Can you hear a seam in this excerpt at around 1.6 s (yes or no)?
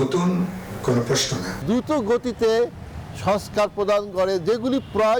yes